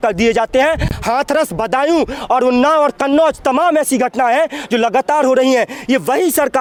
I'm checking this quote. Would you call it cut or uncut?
uncut